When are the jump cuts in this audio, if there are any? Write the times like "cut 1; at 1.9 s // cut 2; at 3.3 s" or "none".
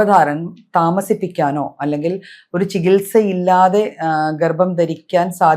none